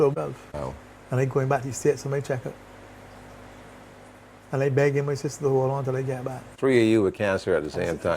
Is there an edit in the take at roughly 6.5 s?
yes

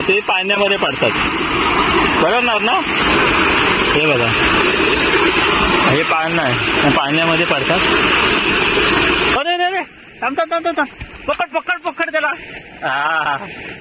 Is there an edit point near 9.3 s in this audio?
yes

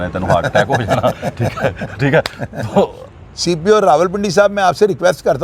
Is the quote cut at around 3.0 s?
yes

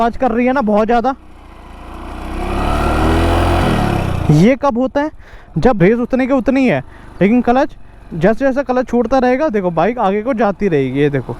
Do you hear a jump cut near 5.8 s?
yes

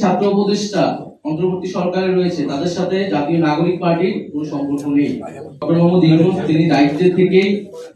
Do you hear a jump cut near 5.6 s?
yes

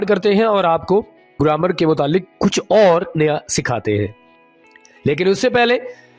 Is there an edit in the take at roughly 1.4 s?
yes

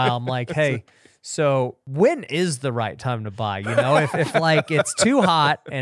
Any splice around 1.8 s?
yes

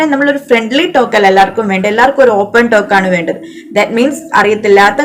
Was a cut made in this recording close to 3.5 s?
no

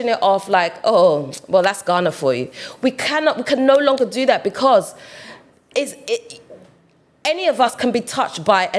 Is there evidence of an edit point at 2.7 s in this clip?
no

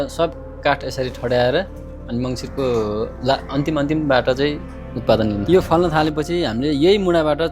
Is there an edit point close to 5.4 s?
yes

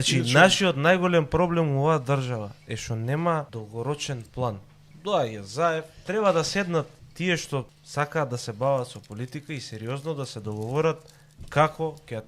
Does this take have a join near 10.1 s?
no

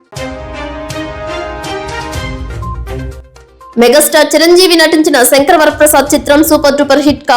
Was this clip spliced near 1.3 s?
no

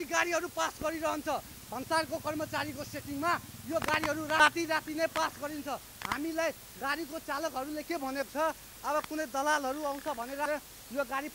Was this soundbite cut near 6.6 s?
no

